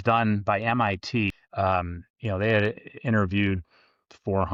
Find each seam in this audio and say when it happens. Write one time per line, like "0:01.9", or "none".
none